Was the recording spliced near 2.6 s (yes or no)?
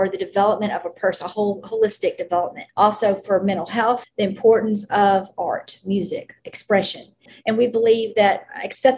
yes